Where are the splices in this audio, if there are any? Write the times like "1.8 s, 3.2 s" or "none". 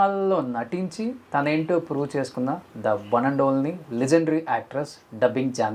none